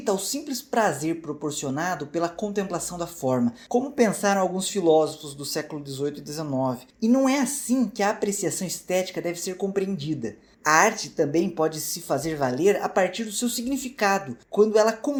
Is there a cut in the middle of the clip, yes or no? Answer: no